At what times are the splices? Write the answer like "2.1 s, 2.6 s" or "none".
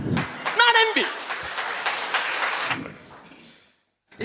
2.7 s